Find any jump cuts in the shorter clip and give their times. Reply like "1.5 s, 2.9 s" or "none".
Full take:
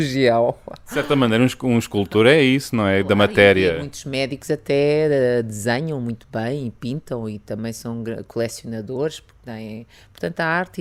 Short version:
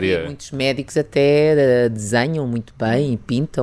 none